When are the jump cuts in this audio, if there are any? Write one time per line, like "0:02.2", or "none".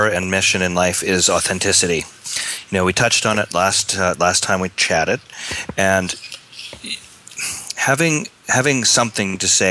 none